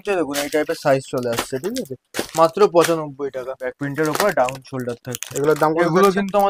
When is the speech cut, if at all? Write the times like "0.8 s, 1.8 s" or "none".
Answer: 3.7 s